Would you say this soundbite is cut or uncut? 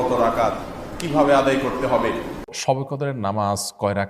cut